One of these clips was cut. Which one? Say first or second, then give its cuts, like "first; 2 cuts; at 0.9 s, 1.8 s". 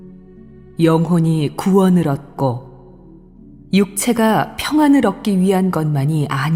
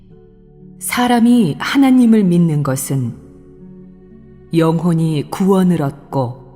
second; 1 cut; at 1.2 s